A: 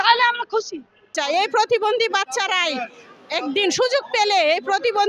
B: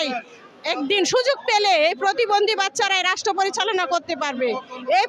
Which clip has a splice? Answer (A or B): A